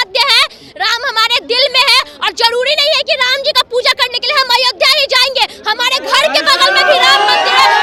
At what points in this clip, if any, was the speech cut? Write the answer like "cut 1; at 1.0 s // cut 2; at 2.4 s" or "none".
none